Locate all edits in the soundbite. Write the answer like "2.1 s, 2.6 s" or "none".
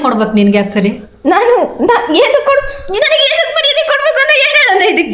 none